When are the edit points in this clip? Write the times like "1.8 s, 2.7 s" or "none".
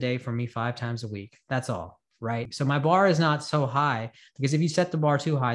2.5 s